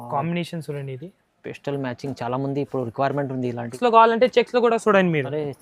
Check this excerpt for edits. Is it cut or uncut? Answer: cut